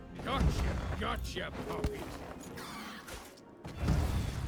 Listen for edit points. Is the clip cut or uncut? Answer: uncut